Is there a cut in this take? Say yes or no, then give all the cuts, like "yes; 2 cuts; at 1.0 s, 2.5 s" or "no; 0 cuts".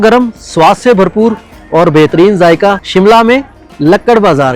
yes; 1 cut; at 2.8 s